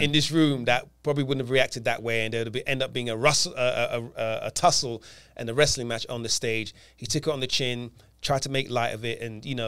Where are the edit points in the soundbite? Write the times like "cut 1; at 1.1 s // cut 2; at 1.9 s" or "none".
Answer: none